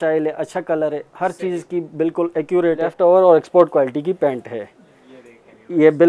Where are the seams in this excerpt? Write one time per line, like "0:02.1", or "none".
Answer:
0:02.9

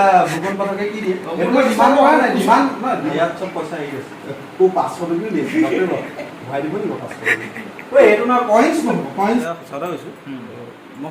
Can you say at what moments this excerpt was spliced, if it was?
0:03.1
0:09.4

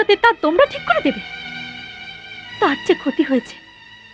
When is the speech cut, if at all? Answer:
none

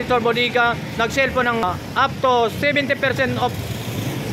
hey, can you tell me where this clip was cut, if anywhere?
0:01.6

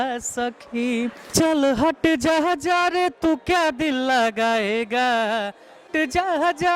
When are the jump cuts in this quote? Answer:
0:01.3
0:05.8

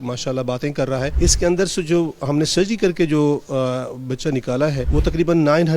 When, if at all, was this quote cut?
0:01.1
0:04.8

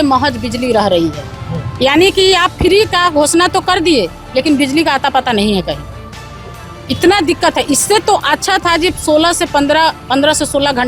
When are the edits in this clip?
none

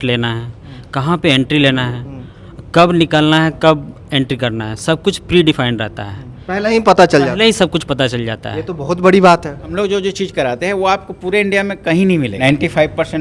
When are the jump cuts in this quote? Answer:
0:09.7
0:12.4

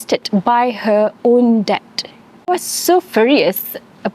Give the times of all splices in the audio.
0:02.5

